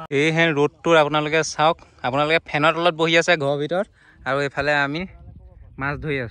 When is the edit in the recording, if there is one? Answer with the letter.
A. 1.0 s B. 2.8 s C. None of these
C